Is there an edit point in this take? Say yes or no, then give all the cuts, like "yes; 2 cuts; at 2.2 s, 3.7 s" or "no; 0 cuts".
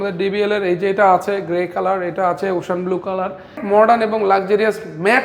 yes; 1 cut; at 3.6 s